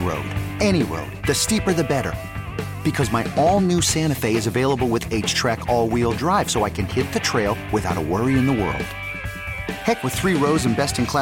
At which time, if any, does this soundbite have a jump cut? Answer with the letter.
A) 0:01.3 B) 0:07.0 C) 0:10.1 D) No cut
D